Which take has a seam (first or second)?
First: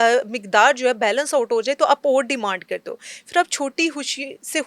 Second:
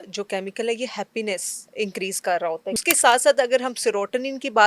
second